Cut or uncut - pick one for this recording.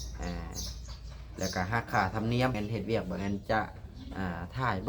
cut